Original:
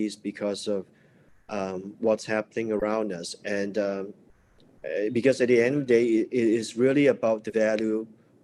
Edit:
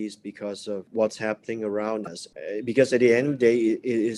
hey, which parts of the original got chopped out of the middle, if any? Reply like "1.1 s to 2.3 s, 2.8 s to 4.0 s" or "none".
0.9 s to 1.9 s, 2.8 s to 4.2 s